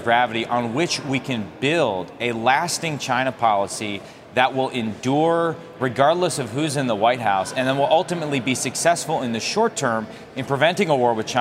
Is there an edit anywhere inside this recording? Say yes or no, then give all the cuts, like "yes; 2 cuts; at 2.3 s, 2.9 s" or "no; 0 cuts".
no; 0 cuts